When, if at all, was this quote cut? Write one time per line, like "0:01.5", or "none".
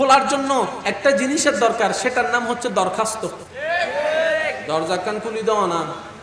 0:03.5